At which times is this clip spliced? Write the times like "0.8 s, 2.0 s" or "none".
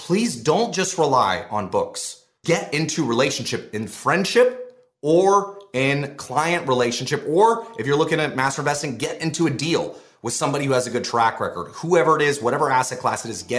2.4 s